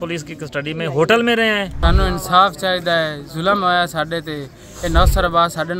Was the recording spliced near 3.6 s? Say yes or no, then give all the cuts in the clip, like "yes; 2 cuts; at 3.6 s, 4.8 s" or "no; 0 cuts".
no; 1 cut; at 1.8 s